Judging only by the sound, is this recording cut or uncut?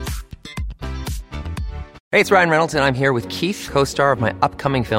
cut